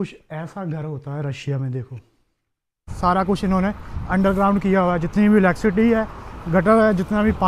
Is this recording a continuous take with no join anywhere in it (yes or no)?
no